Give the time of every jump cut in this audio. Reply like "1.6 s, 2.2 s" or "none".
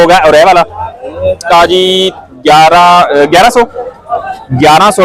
1.4 s